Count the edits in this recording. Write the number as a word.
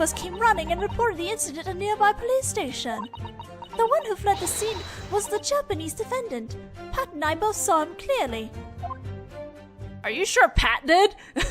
one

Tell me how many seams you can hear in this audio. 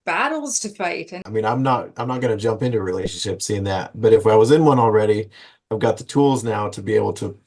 one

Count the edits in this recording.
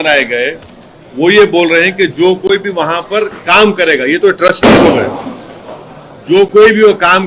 zero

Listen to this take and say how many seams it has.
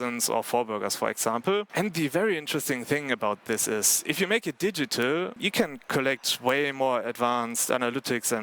two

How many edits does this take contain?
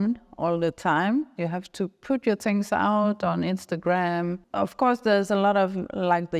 one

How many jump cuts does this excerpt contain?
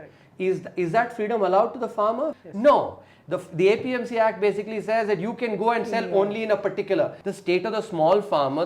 two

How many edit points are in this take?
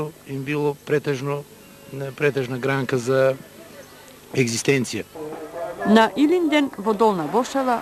one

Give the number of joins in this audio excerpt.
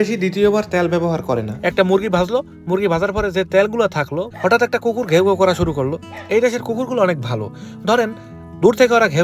one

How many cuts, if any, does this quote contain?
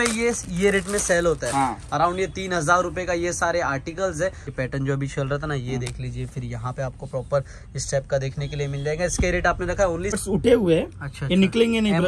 two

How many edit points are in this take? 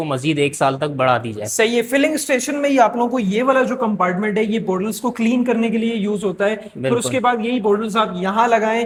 zero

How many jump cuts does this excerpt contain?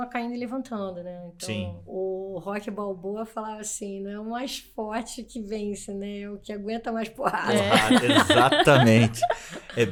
zero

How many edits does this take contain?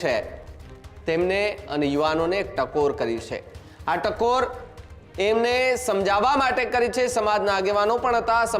zero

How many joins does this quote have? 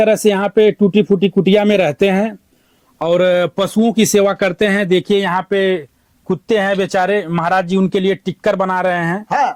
zero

